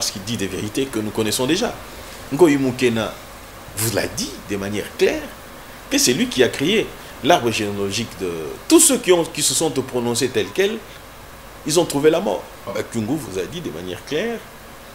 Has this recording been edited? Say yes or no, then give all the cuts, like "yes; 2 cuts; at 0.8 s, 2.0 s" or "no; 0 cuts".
yes; 1 cut; at 12.7 s